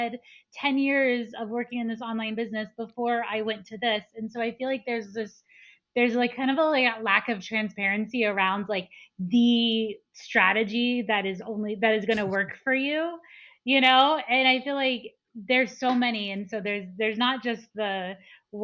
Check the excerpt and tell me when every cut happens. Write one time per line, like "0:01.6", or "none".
none